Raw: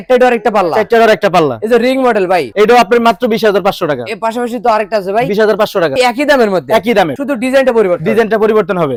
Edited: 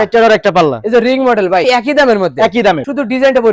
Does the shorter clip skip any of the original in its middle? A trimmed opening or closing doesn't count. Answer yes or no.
yes